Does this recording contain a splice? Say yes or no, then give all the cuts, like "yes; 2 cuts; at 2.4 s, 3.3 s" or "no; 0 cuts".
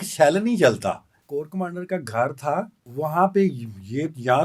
yes; 2 cuts; at 1.1 s, 2.8 s